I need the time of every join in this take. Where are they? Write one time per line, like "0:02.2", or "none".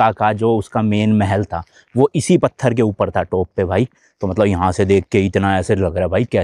none